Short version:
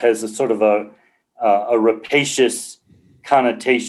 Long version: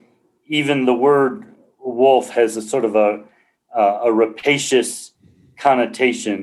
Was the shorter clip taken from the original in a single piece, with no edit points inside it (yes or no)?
yes